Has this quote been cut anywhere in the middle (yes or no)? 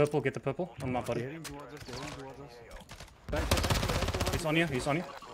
yes